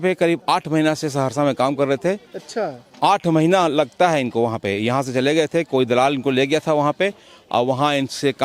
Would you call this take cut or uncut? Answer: uncut